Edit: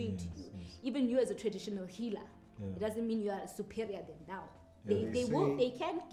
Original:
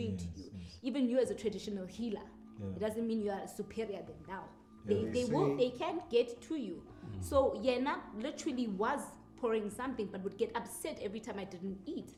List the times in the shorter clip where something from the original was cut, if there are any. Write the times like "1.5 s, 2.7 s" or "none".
none